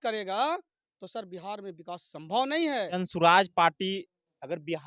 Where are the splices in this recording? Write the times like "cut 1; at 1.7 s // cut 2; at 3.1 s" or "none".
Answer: cut 1; at 2.9 s